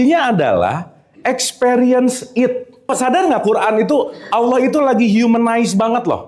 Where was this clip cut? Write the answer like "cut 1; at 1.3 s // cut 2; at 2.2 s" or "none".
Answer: cut 1; at 2.9 s